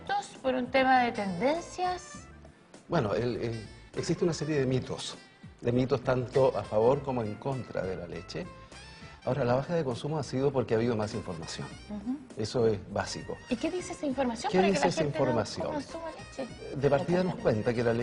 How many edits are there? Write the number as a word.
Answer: one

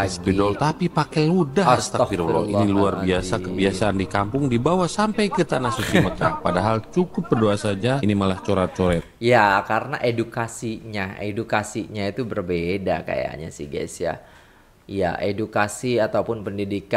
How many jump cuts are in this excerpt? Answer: zero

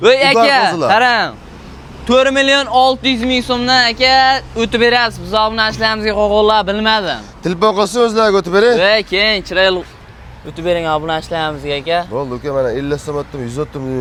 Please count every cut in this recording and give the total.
zero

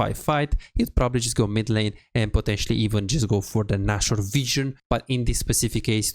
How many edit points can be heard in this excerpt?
one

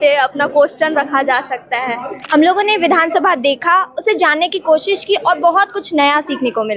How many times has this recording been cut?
one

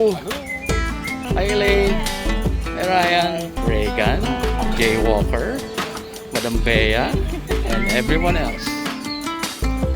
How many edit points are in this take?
two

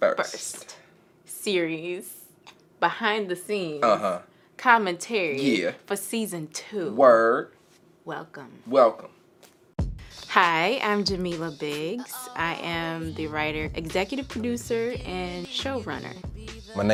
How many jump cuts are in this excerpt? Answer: zero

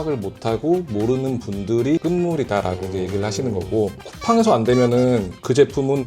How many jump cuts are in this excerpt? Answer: one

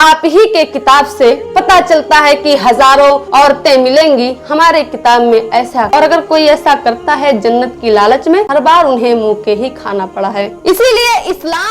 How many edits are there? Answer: two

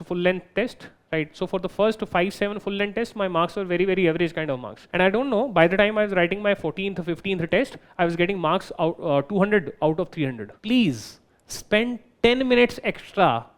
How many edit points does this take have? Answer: two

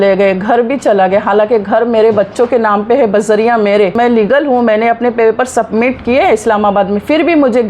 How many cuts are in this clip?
one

